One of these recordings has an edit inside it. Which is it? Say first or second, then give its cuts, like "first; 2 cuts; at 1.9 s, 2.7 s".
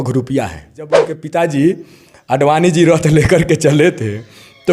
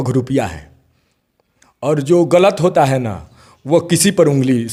first; 1 cut; at 1.1 s